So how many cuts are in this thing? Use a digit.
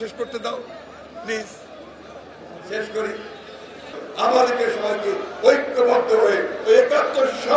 1